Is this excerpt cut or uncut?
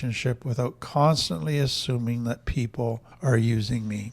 cut